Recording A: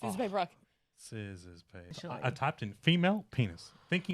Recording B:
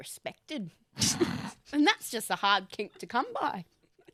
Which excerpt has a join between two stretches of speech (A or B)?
A